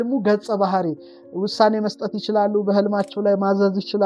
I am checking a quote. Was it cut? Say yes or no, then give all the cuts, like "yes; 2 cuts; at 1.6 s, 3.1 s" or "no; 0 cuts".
no; 0 cuts